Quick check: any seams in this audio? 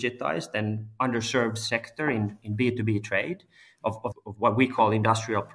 yes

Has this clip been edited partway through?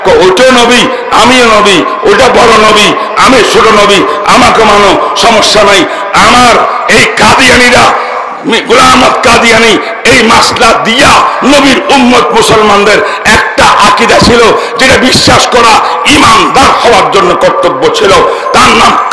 no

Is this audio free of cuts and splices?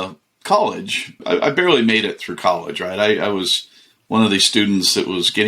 no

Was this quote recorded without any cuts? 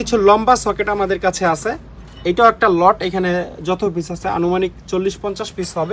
yes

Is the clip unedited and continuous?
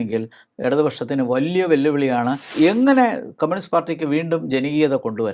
no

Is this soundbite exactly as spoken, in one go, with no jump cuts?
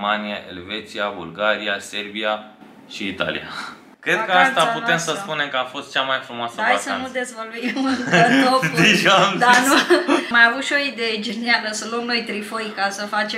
no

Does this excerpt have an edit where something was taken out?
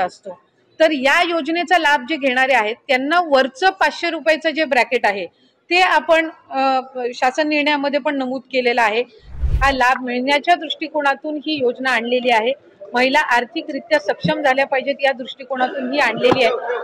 yes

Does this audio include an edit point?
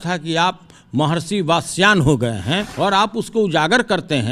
yes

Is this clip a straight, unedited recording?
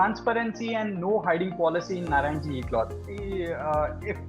no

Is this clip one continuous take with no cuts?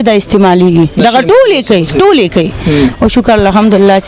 no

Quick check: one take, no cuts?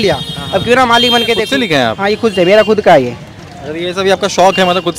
no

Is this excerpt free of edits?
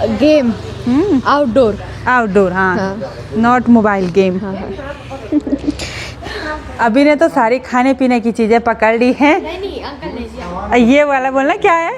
yes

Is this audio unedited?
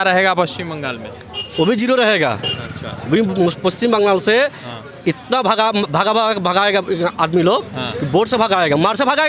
yes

